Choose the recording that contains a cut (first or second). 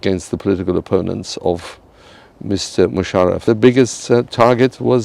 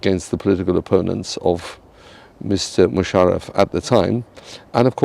first